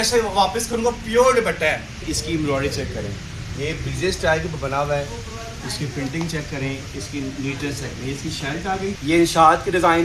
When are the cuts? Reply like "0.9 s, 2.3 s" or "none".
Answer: 2.1 s, 9.0 s